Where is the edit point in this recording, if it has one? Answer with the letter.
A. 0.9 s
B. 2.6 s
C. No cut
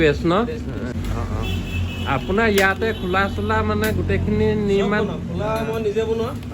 A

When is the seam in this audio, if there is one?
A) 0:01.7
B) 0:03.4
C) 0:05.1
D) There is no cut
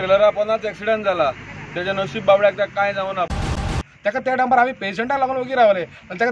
B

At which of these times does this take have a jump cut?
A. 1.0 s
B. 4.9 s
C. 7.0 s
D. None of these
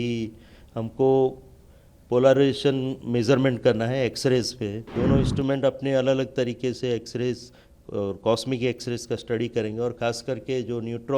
B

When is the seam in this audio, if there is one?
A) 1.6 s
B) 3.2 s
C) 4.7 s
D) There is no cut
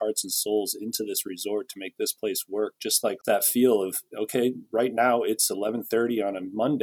B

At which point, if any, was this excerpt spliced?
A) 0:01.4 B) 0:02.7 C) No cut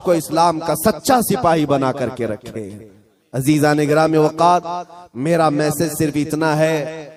C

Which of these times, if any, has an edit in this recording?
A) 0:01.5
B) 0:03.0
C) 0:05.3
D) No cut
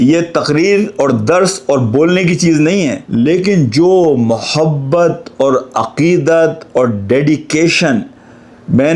B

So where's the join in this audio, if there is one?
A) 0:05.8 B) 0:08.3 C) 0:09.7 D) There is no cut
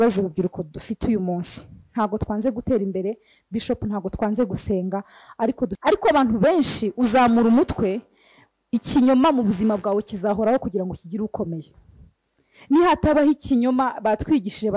A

